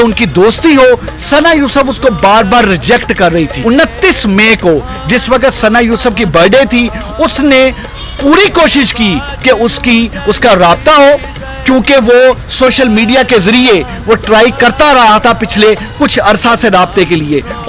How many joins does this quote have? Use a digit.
1